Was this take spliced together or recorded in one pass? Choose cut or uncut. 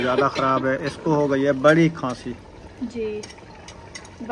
uncut